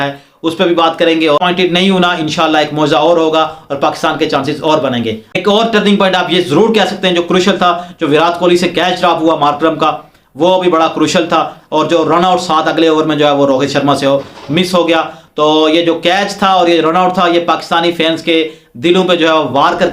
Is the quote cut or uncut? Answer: cut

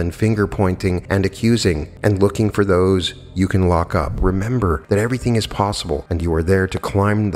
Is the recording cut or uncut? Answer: cut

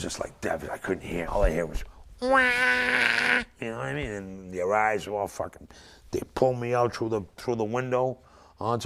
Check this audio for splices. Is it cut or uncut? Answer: uncut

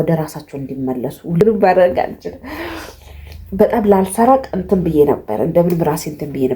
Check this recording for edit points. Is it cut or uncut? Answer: cut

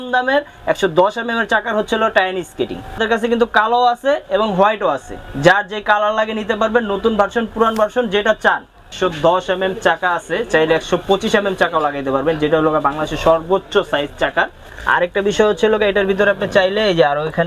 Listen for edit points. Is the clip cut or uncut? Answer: cut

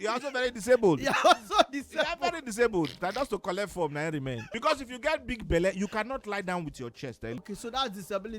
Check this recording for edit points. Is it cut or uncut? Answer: cut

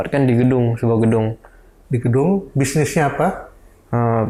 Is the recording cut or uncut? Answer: uncut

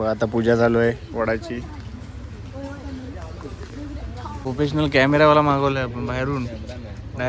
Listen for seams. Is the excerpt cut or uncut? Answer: cut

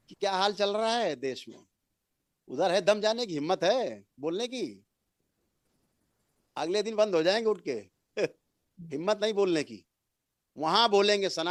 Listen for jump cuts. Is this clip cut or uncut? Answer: uncut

